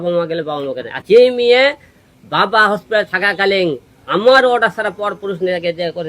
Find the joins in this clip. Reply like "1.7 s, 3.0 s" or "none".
0.9 s